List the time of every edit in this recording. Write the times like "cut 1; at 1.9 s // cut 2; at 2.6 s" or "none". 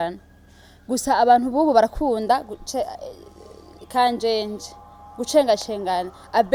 none